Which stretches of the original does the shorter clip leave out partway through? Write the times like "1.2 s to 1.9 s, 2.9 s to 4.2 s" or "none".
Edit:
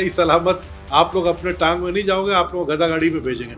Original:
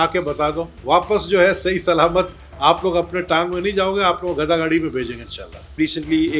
none